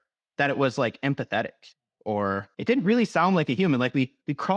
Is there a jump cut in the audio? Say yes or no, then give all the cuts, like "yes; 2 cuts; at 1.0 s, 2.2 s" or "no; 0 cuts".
yes; 1 cut; at 2.5 s